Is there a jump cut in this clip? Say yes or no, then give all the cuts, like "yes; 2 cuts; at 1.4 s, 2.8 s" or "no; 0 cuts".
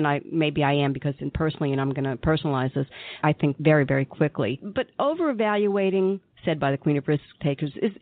yes; 2 cuts; at 3.5 s, 4.7 s